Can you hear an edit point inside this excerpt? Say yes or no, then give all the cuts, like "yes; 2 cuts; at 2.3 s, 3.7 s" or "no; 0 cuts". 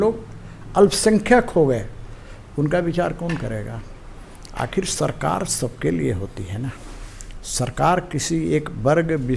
no; 0 cuts